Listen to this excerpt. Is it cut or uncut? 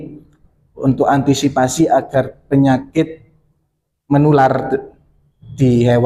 uncut